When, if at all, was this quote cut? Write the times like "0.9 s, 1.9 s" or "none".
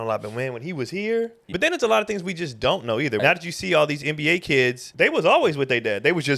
1.5 s, 3.2 s, 4.9 s